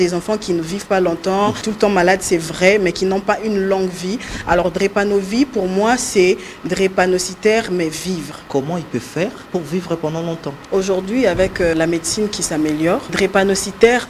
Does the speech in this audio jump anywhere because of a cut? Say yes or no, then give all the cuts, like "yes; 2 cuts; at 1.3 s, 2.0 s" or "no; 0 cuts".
yes; 6 cuts; at 1.6 s, 8.3 s, 9.4 s, 10.5 s, 11.8 s, 13.1 s